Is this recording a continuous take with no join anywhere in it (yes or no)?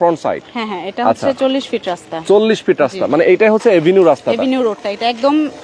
yes